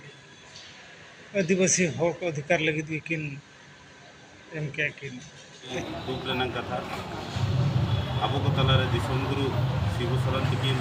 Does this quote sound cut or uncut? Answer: cut